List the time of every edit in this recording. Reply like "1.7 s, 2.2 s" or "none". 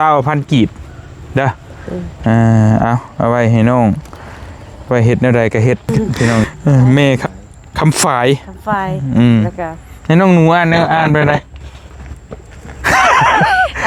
6.4 s, 7.2 s